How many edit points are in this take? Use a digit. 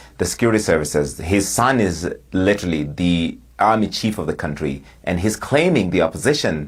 0